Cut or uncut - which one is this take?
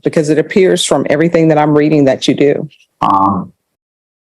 cut